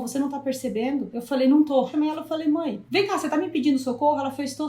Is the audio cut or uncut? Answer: cut